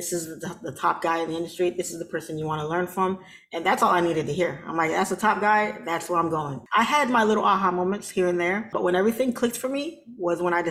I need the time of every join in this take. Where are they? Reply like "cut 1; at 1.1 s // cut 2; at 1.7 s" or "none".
cut 1; at 6.6 s // cut 2; at 8.7 s

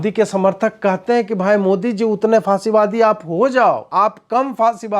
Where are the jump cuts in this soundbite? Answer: cut 1; at 3.8 s

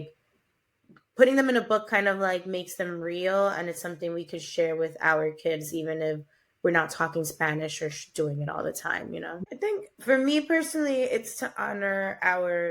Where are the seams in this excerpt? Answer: cut 1; at 9.4 s

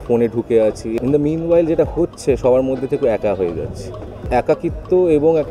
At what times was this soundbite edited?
cut 1; at 0.9 s // cut 2; at 4.2 s

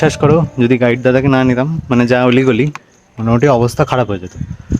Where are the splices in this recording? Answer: none

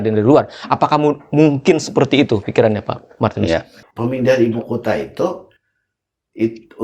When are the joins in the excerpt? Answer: cut 1; at 3.8 s

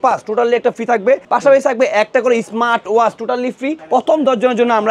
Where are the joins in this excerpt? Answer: cut 1; at 1.2 s // cut 2; at 3.8 s

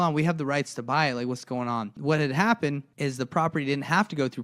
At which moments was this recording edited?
cut 1; at 1.9 s // cut 2; at 2.9 s

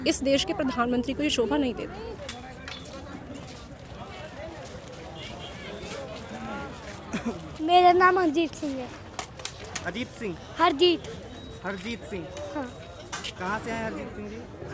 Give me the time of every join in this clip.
none

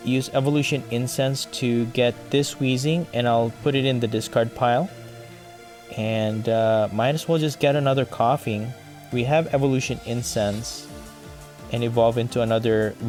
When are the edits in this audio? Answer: none

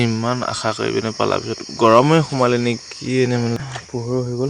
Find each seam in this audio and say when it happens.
cut 1; at 3.6 s

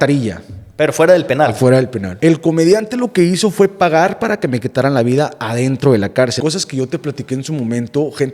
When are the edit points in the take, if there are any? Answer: cut 1; at 2.0 s // cut 2; at 6.4 s

